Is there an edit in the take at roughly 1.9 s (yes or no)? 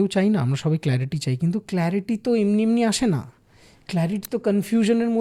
no